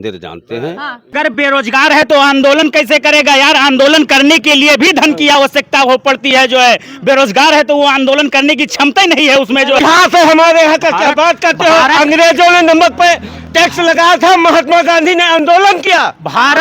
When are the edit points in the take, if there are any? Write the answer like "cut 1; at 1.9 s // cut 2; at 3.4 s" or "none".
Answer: cut 1; at 1.1 s // cut 2; at 9.8 s